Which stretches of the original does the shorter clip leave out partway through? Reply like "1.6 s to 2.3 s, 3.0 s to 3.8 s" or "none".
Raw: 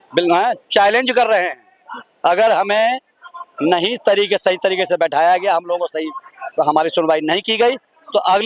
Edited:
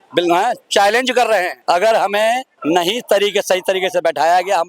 1.5 s to 2.1 s, 3.1 s to 3.5 s